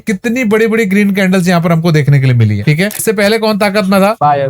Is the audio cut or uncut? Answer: cut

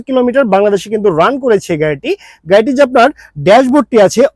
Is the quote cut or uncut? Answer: uncut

